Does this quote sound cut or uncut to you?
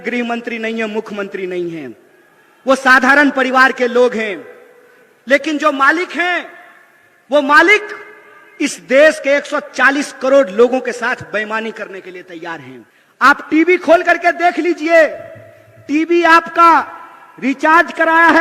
uncut